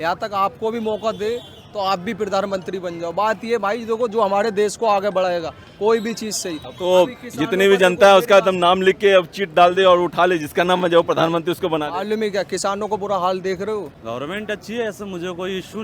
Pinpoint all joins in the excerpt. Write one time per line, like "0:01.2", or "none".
0:14.0